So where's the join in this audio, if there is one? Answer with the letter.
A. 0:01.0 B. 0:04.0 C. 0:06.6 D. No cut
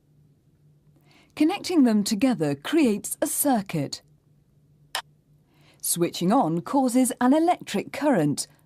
C